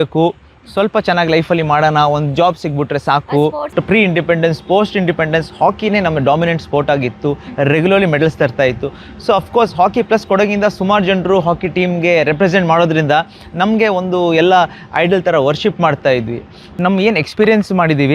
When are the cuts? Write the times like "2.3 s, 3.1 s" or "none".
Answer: 3.5 s, 16.8 s

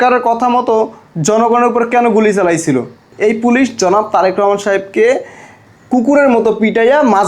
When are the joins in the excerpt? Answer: 3.1 s

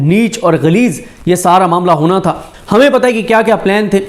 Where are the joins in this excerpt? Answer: 2.5 s

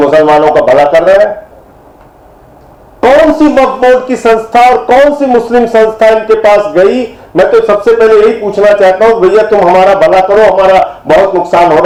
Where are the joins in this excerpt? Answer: none

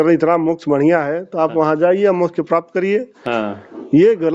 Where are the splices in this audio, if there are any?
none

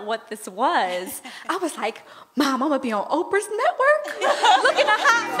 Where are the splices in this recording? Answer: none

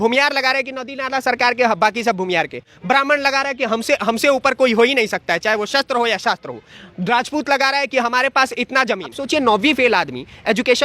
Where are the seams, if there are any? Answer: 9.1 s

